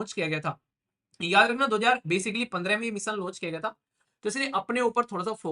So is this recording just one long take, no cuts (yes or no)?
no